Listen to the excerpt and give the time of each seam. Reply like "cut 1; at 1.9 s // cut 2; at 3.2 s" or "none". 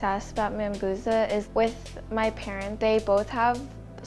cut 1; at 1.5 s // cut 2; at 2.7 s